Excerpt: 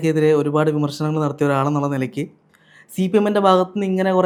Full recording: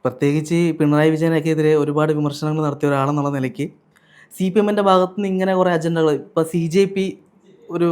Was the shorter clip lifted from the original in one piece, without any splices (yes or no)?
yes